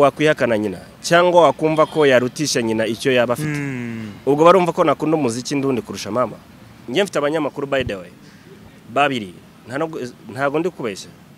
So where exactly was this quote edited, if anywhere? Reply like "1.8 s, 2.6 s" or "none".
6.8 s